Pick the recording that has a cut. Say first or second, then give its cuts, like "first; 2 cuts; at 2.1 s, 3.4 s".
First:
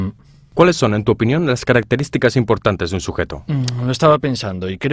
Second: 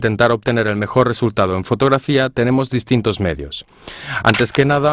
first; 1 cut; at 4.0 s